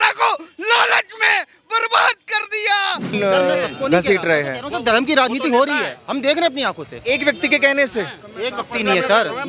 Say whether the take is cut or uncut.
cut